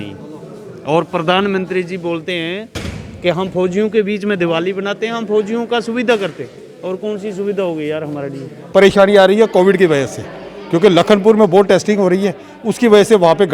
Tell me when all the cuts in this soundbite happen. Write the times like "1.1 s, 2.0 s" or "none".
8.6 s